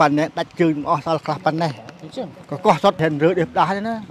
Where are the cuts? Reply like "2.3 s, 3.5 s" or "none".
3.0 s